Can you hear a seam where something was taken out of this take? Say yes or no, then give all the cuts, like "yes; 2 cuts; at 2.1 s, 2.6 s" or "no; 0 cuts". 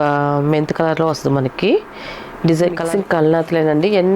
yes; 1 cut; at 2.8 s